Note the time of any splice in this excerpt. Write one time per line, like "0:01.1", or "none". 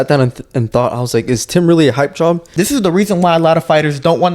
0:02.5